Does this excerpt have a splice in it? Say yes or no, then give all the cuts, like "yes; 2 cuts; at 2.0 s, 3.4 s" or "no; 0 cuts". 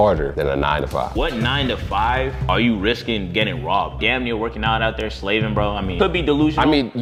no; 0 cuts